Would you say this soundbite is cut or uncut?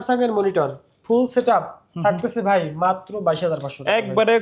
uncut